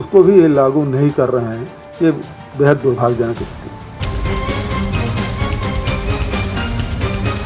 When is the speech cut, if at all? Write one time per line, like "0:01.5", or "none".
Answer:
none